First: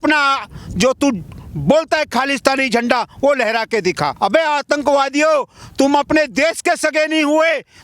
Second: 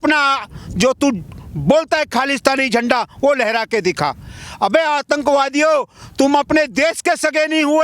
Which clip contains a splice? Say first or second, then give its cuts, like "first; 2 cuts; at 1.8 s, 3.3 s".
first; 1 cut; at 4.1 s